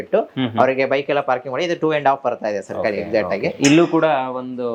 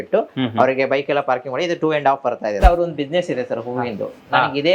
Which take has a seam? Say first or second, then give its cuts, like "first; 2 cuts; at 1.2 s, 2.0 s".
second; 1 cut; at 2.6 s